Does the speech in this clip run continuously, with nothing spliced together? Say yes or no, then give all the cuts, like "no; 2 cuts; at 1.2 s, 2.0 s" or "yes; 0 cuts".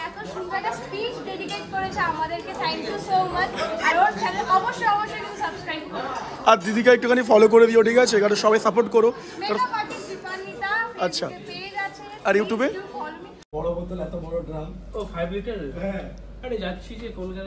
no; 1 cut; at 13.4 s